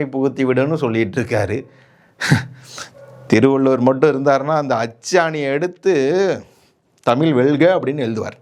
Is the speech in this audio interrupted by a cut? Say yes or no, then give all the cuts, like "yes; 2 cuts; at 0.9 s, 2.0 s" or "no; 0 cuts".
no; 0 cuts